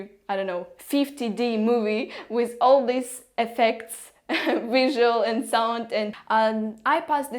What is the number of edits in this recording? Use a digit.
1